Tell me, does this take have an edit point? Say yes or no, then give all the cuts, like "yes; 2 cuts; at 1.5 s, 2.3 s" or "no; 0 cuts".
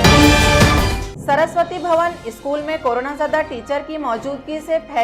no; 0 cuts